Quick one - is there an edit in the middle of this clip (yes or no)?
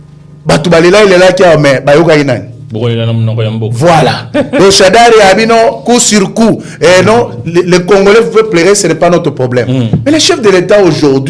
no